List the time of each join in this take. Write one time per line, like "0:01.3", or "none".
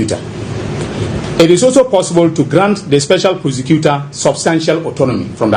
none

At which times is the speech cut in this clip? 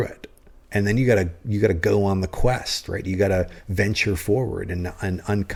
none

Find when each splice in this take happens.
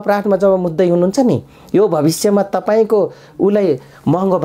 none

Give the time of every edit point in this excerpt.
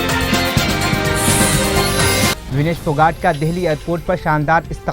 0:02.4

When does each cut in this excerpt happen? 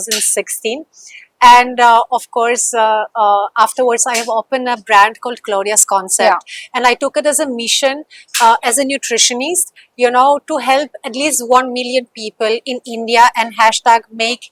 none

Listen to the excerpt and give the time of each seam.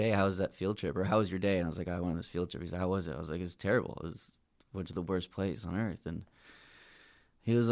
none

